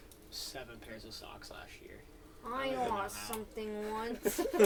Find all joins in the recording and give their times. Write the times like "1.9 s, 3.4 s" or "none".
none